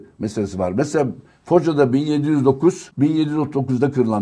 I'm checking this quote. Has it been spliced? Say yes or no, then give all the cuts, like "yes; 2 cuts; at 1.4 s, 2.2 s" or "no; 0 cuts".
yes; 1 cut; at 2.9 s